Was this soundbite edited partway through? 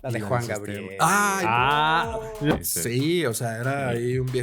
yes; 1 cut; at 2.5 s

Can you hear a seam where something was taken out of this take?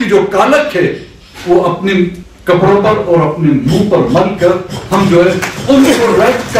no; 0 cuts

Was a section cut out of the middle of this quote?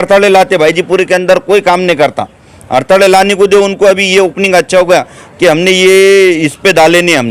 no; 0 cuts

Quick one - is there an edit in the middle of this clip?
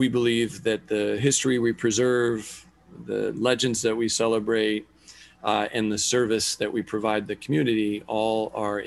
no; 0 cuts

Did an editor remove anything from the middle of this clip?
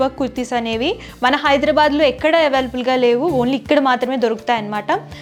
no; 0 cuts

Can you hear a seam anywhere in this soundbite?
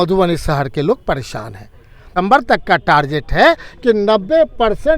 yes; 1 cut; at 2.1 s

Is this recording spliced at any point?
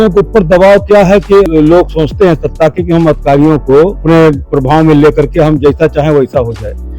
yes; 2 cuts; at 1.5 s, 4.0 s

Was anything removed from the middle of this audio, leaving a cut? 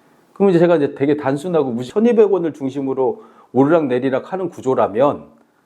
yes; 1 cut; at 1.9 s

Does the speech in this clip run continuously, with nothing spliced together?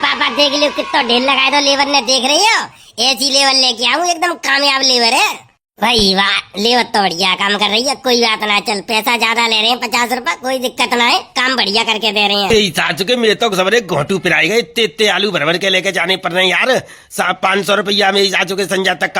no; 1 cut; at 12.5 s

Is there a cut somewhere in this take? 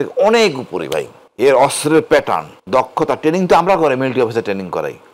yes; 2 cuts; at 1.2 s, 2.5 s

